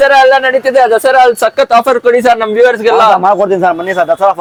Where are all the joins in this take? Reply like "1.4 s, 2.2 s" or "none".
none